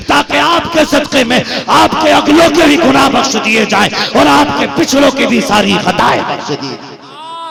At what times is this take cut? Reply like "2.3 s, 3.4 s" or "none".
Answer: none